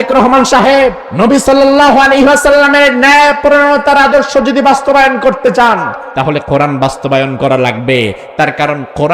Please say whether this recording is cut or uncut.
cut